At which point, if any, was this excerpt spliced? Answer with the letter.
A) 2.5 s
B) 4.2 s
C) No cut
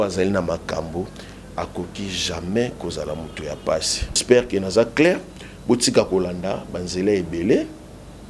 B